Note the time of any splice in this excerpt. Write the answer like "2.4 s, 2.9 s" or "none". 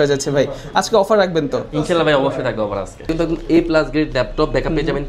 3.1 s